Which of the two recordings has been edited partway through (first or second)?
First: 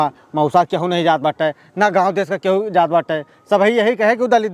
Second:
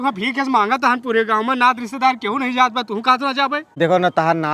second